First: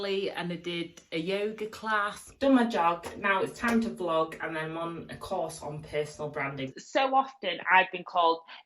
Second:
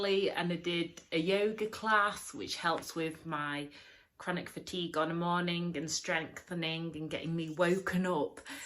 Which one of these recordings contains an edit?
first; 2 cuts; at 2.2 s, 6.7 s

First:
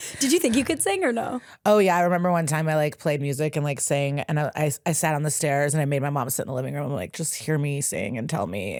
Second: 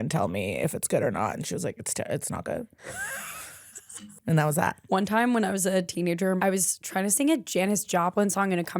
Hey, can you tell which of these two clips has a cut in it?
second; 4 cuts; at 2.8 s, 4.1 s, 4.8 s, 6.4 s

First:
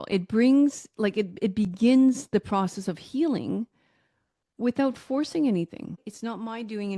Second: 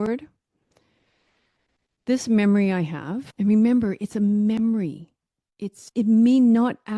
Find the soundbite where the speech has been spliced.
first; 1 cut; at 6.1 s

